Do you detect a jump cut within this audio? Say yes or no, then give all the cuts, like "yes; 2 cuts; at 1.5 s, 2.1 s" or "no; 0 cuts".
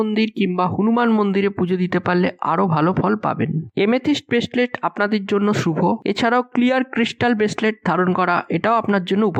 no; 0 cuts